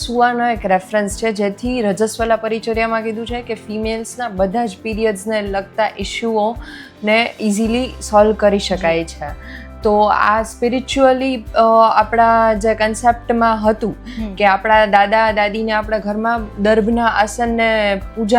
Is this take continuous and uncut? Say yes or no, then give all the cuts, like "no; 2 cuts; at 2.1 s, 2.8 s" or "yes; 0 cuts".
yes; 0 cuts